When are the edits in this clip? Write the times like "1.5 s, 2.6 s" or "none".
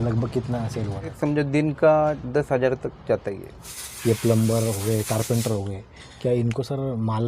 1.2 s, 3.6 s